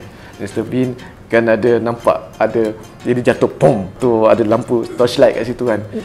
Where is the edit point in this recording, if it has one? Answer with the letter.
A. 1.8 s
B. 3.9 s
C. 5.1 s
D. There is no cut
B